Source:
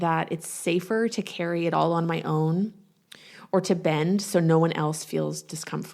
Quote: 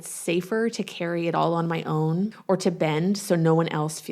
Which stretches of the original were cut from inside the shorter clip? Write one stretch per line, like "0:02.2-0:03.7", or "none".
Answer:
0:02.8-0:03.4